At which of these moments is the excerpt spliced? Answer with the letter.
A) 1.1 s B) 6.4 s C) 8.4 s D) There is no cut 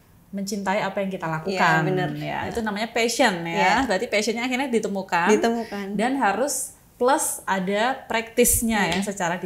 D